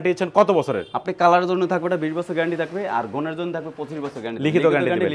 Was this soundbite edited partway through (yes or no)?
no